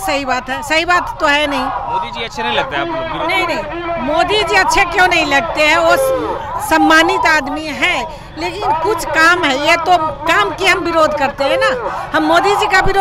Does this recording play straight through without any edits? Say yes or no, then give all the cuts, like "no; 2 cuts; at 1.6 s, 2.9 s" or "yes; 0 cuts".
yes; 0 cuts